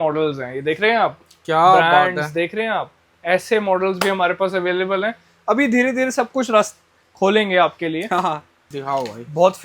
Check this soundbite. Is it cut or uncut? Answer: cut